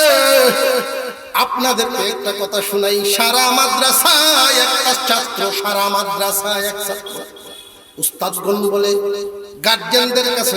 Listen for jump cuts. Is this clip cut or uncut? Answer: cut